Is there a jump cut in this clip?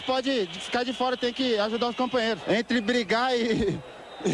yes; 1 cut; at 2.4 s

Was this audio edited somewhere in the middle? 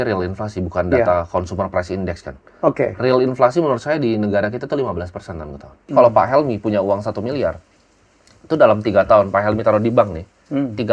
yes; 1 cut; at 5.9 s

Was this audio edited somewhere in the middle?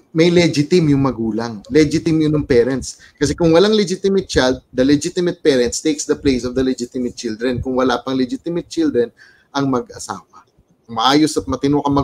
yes; 1 cut; at 10.8 s

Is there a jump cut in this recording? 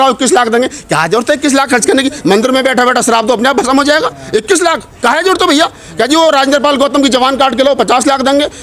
no; 0 cuts

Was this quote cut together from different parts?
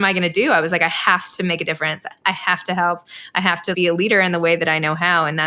yes; 1 cut; at 3.7 s

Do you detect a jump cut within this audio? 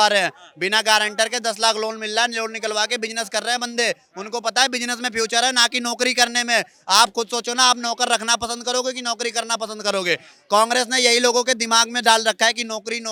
no; 0 cuts

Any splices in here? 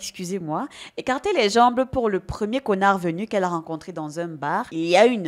no; 0 cuts

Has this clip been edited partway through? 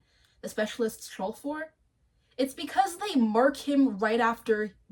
no; 0 cuts

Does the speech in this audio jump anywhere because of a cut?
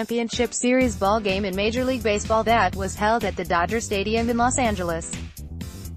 yes; 1 cut; at 5.1 s

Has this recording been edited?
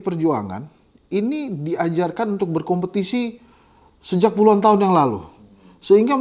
no; 0 cuts

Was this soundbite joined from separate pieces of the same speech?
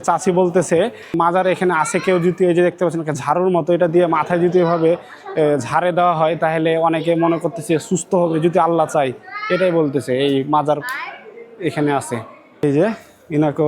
no; 0 cuts

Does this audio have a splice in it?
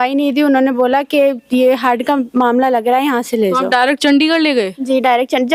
no; 0 cuts

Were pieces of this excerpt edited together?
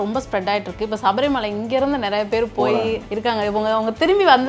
no; 0 cuts

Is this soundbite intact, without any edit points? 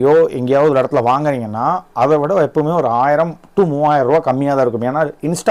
yes; 0 cuts

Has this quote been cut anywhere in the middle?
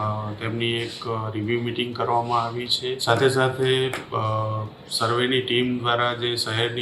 yes; 1 cut; at 3.0 s

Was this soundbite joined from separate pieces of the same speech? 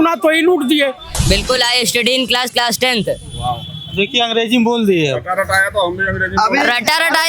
yes; 1 cut; at 1.1 s

